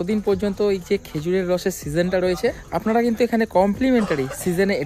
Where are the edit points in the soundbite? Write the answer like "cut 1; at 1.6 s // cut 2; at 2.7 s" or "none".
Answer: cut 1; at 2.7 s